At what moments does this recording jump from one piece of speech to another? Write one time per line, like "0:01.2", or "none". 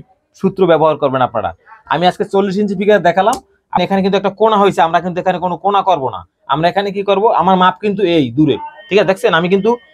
0:03.8